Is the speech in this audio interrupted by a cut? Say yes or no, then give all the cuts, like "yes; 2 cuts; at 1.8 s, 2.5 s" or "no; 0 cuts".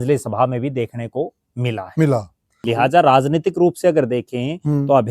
yes; 1 cut; at 2.6 s